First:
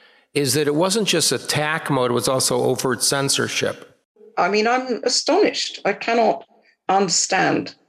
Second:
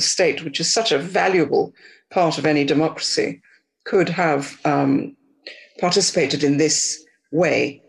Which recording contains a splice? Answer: first; 1 cut; at 4.1 s

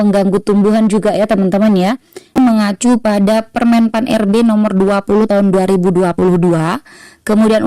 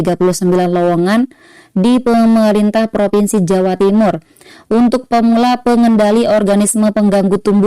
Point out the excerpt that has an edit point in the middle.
first; 1 cut; at 2.4 s

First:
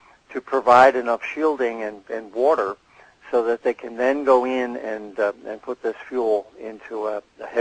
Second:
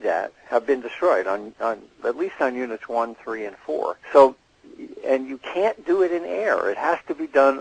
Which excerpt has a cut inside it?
second; 1 cut; at 4.6 s

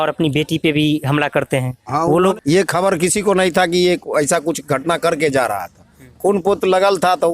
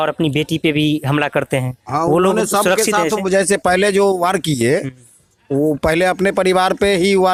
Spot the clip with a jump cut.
first; 1 cut; at 2.3 s

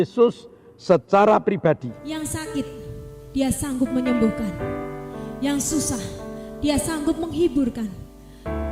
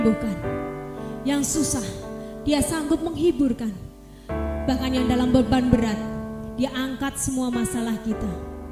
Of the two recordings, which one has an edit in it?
first; 1 cut; at 2.0 s

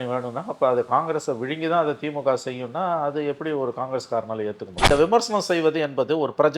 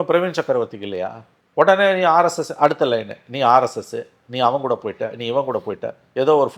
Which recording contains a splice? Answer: first; 1 cut; at 4.9 s

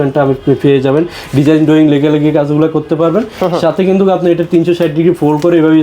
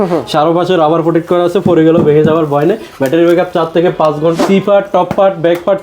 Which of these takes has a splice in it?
second; 1 cut; at 4.4 s

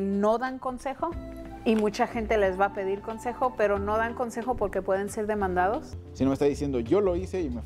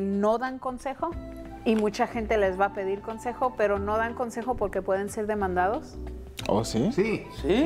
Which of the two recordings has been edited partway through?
first; 1 cut; at 6.0 s

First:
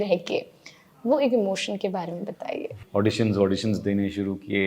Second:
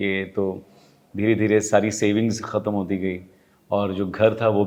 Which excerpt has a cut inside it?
first; 1 cut; at 2.7 s

